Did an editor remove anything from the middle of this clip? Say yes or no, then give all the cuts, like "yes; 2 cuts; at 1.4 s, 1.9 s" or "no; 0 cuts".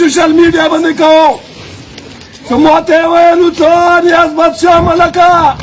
no; 0 cuts